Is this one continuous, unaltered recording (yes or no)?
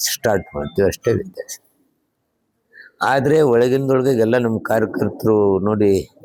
yes